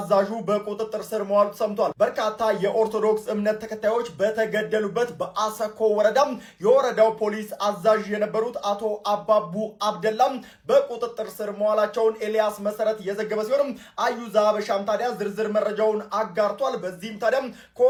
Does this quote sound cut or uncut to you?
uncut